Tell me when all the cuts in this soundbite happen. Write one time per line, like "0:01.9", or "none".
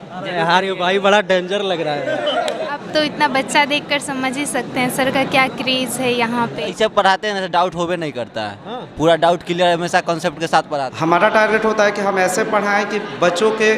0:02.8
0:06.7
0:10.9